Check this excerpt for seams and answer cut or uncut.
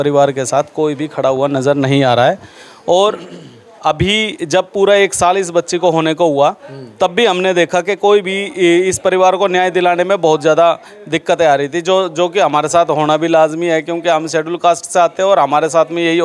uncut